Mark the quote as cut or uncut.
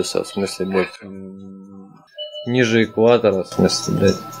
cut